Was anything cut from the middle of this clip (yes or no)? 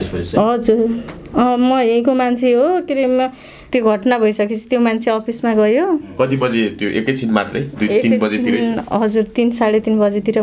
yes